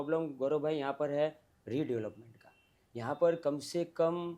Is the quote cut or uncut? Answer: uncut